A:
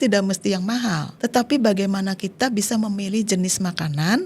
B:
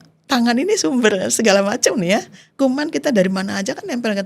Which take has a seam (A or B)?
A